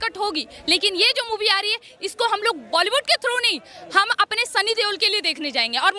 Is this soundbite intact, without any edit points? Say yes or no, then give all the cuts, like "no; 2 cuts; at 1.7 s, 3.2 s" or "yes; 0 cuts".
yes; 0 cuts